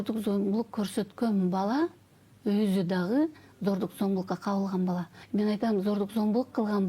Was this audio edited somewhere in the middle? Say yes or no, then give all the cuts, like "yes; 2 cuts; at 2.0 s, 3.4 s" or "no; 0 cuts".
yes; 1 cut; at 5.1 s